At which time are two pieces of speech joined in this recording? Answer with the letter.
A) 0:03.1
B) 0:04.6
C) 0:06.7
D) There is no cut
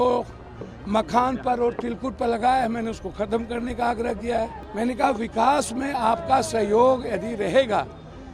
B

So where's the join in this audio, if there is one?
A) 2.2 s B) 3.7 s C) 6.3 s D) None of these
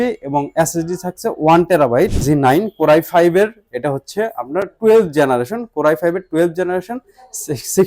A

